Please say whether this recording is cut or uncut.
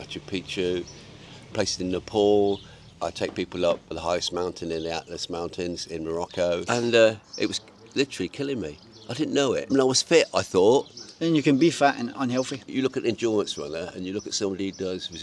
cut